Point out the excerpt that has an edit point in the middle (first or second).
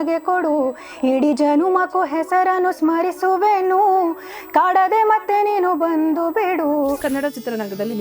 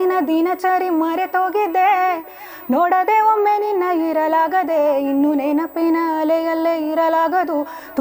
first